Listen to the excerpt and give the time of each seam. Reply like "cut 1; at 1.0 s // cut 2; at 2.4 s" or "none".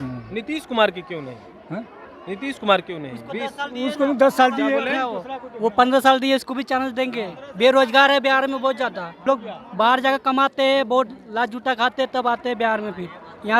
cut 1; at 9.1 s